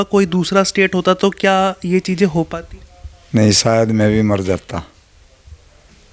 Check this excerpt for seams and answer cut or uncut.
uncut